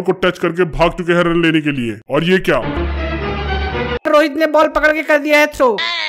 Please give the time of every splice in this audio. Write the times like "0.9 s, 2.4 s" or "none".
4.1 s